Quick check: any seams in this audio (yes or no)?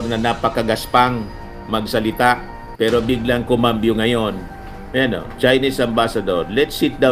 no